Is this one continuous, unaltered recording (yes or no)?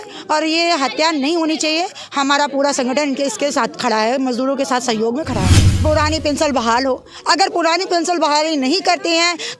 no